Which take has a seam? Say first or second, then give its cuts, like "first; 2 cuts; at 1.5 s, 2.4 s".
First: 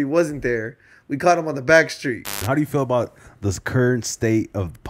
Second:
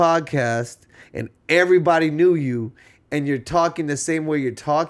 first; 1 cut; at 2.3 s